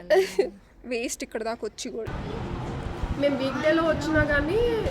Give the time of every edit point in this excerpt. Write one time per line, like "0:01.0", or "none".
0:02.1